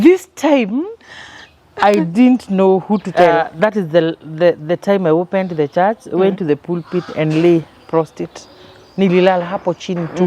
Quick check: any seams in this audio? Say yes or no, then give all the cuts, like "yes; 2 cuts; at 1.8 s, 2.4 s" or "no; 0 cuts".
yes; 1 cut; at 3.2 s